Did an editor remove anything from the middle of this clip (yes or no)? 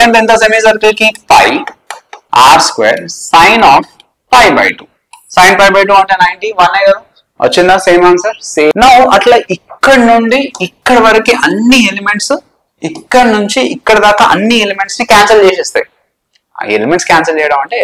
yes